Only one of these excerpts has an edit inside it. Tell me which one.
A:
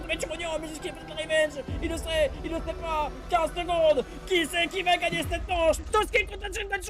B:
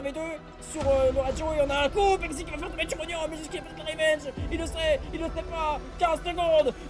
A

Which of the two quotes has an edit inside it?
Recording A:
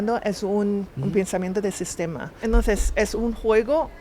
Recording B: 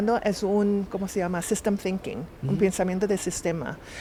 A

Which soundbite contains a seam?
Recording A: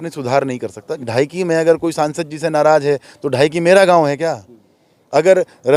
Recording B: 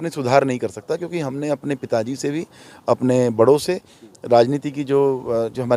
A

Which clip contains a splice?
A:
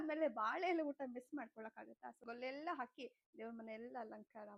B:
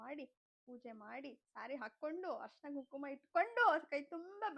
A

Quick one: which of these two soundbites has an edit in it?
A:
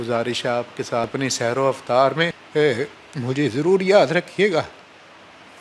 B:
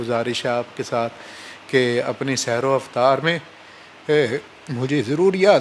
A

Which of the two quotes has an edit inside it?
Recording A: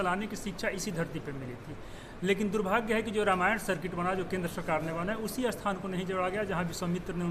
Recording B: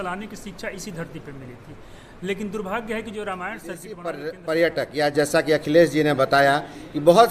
B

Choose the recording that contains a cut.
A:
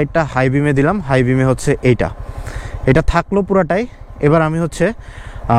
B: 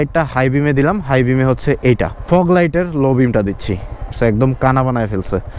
B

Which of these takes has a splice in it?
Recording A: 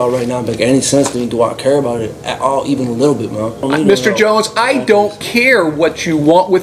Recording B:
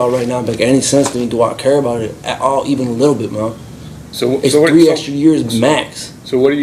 A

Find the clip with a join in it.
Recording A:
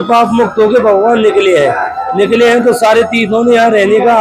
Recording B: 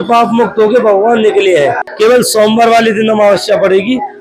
B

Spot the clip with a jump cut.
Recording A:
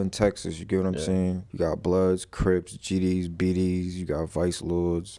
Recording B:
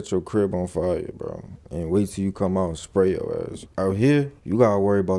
B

